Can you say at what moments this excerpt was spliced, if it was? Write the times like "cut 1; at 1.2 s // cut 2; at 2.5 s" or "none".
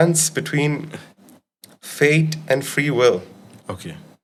none